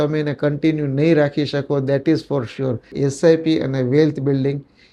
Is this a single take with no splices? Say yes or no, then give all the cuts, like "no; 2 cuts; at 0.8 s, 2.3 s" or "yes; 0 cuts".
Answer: no; 1 cut; at 2.9 s